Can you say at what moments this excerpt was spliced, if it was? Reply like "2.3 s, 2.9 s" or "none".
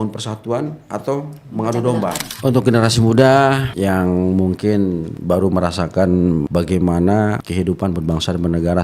2.3 s, 3.7 s, 5.1 s, 6.5 s, 7.4 s